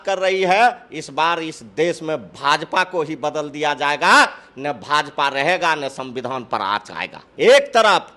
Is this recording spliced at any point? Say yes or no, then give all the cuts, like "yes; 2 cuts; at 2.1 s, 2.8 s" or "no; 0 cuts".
yes; 1 cut; at 7.3 s